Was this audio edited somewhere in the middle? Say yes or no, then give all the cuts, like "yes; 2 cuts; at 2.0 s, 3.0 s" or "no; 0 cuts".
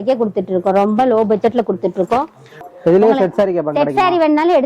yes; 1 cut; at 2.6 s